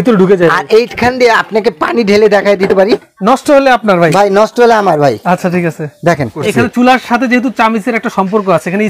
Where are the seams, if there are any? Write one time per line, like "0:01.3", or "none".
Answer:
0:03.1
0:06.4